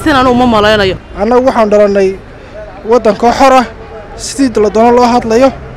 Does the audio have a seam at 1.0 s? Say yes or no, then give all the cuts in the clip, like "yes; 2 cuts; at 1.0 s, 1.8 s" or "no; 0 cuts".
yes; 1 cut; at 1.0 s